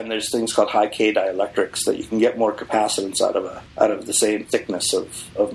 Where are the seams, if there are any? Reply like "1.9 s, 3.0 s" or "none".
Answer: none

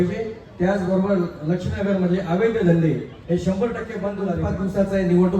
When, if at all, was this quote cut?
4.3 s

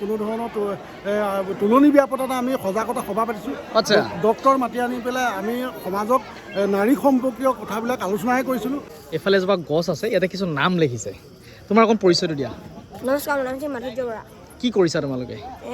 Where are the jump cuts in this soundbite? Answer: 8.8 s

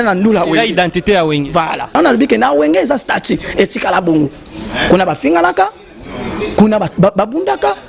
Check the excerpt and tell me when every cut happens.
2.0 s

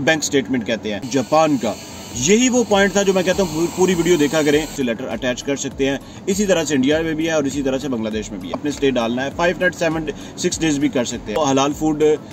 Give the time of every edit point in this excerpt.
1.1 s, 4.8 s, 8.7 s, 11.4 s

